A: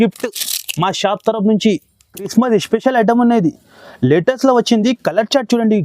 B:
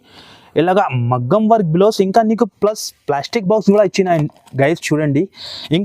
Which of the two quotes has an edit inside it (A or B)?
A